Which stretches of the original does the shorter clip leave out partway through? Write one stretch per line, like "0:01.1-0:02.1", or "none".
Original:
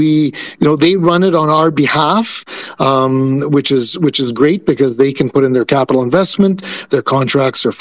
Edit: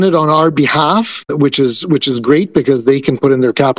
0:02.5-0:03.4